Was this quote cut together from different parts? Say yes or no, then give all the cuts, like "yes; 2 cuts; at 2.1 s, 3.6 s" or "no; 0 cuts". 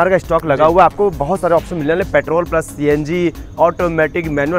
no; 0 cuts